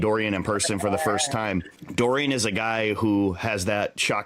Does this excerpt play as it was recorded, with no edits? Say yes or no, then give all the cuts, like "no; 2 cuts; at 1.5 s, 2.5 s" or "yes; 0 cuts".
no; 1 cut; at 1.8 s